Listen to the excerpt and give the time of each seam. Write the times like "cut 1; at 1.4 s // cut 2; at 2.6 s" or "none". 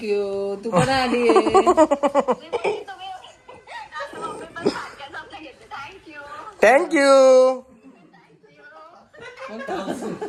none